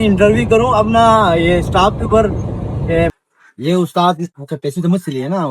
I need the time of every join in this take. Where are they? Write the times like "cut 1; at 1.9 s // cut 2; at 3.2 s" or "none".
cut 1; at 3.1 s

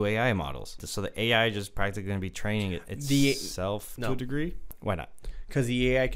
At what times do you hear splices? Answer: cut 1; at 0.8 s // cut 2; at 4.7 s

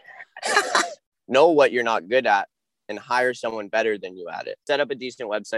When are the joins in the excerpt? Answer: cut 1; at 1.0 s // cut 2; at 4.6 s

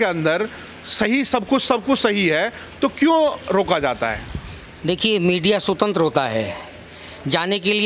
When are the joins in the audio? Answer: none

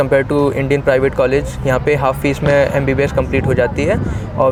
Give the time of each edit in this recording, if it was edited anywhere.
none

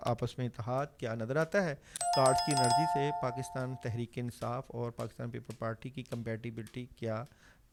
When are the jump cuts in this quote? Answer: none

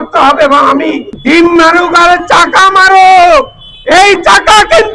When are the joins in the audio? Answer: cut 1; at 1.1 s

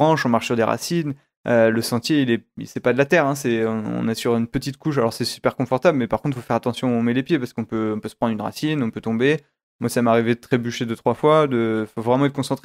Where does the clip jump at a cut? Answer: none

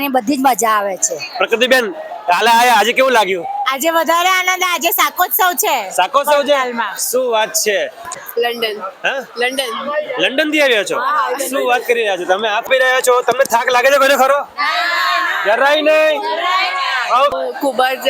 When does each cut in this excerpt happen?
cut 1; at 8.1 s // cut 2; at 12.7 s // cut 3; at 17.3 s

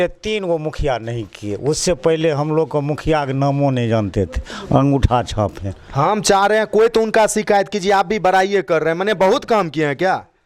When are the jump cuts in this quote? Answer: none

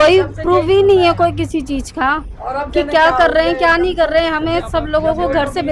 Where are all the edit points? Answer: none

